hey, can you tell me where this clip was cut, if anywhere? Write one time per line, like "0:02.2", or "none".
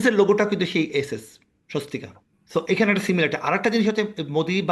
none